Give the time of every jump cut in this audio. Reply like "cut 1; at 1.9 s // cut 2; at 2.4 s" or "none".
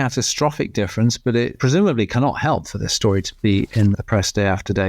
cut 1; at 1.6 s // cut 2; at 3.9 s